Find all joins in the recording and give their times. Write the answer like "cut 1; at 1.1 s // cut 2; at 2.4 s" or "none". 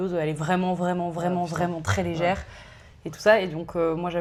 none